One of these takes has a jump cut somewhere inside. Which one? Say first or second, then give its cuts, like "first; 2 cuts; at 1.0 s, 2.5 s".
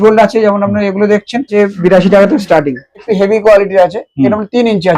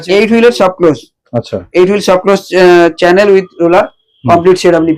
first; 2 cuts; at 1.5 s, 3.0 s